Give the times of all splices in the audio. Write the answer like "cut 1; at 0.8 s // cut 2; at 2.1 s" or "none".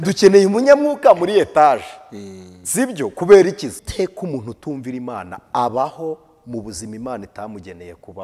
cut 1; at 3.9 s